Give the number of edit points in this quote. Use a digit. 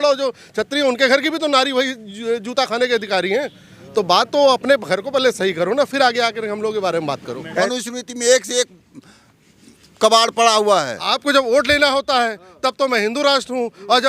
2